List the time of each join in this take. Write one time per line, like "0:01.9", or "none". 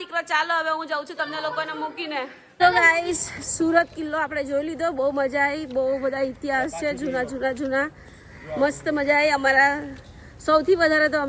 none